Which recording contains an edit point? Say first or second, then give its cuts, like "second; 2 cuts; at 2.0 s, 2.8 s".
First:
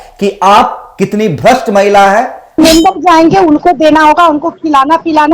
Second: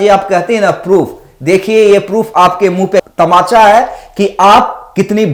first; 1 cut; at 2.6 s